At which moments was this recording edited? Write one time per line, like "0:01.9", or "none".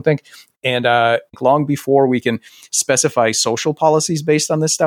0:01.4